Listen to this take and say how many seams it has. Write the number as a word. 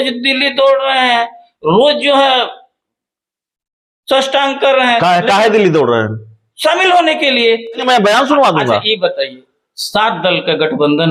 one